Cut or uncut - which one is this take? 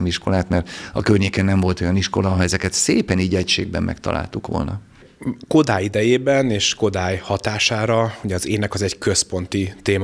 uncut